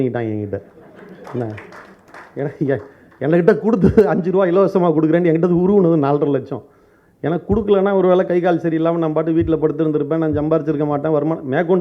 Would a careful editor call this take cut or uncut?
uncut